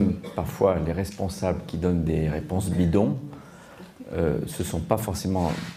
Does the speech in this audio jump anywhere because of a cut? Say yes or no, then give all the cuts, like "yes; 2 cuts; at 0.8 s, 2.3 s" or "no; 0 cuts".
no; 0 cuts